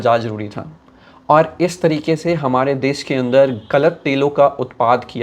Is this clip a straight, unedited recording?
yes; 0 cuts

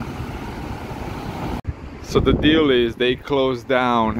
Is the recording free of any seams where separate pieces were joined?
no; 1 cut; at 1.6 s

